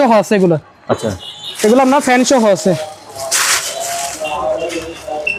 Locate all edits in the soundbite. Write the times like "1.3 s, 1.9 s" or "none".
none